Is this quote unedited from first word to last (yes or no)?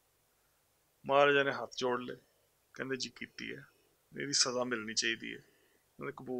yes